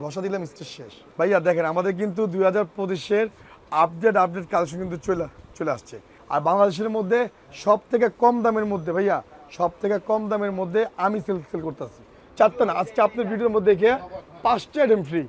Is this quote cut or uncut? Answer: cut